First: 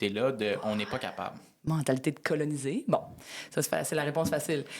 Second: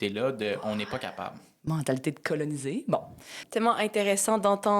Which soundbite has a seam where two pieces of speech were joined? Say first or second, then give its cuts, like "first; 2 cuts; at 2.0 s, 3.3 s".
second; 1 cut; at 3.4 s